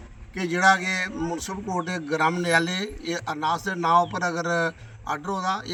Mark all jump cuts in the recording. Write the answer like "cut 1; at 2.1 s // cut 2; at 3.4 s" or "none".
none